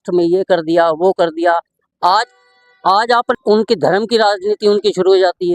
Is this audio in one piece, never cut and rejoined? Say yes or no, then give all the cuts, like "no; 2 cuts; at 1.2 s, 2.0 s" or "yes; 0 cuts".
no; 1 cut; at 3.4 s